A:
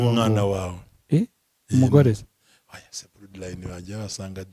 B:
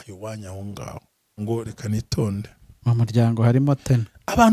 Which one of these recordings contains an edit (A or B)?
B